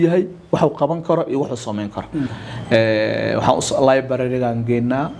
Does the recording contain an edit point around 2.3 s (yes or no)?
yes